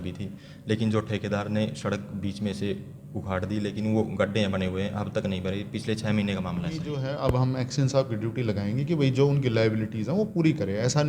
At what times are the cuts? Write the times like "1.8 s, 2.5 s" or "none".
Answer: 7.1 s